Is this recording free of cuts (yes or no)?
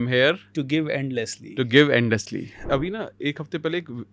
no